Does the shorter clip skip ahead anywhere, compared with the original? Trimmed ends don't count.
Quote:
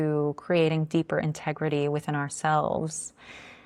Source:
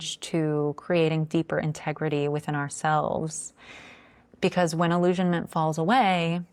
no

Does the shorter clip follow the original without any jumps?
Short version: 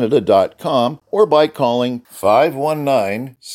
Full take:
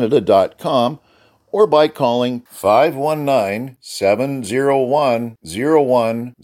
no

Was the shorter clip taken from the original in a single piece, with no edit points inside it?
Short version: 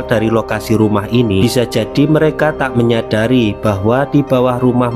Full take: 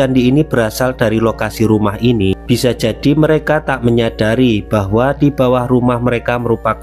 no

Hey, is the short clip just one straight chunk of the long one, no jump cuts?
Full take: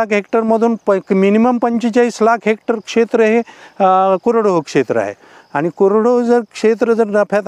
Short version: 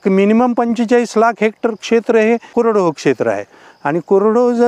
no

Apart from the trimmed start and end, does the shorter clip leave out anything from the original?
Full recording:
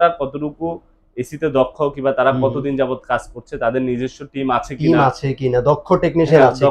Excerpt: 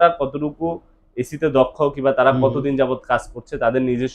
no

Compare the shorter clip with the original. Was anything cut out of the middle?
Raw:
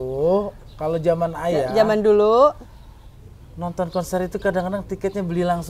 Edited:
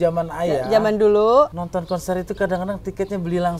yes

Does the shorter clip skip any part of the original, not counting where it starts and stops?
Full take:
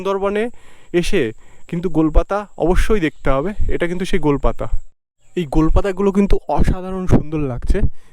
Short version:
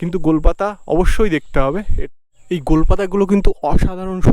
yes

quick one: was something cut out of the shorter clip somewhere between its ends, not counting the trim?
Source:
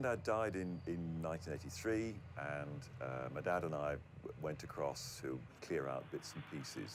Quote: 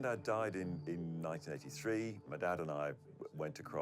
yes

